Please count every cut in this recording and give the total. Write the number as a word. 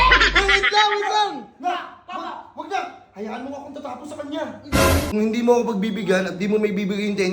one